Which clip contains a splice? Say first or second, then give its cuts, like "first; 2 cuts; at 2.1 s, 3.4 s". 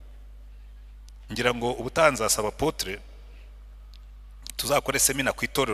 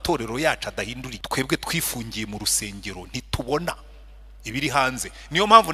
second; 1 cut; at 1.1 s